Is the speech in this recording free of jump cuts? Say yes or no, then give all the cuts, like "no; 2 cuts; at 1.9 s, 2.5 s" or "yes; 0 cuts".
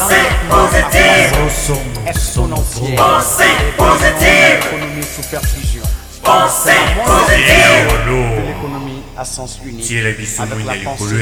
yes; 0 cuts